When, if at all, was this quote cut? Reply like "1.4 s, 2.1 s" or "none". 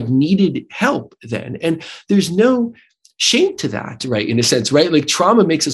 none

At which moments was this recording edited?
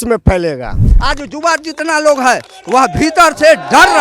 0.9 s

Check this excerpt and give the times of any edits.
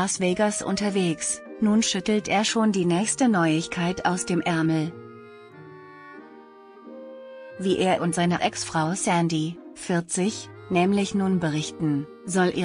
5.4 s, 7.6 s

